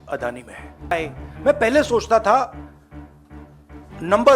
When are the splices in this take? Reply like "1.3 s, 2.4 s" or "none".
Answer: 0.9 s